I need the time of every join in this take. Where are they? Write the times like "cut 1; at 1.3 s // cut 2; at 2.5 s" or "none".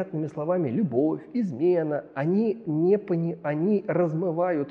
none